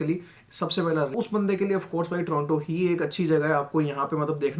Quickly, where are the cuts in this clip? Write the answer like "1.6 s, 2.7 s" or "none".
1.1 s